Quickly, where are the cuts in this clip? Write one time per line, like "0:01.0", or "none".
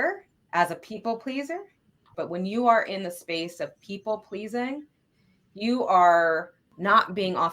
0:02.1